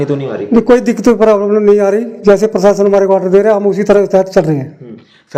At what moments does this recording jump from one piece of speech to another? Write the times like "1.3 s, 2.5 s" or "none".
none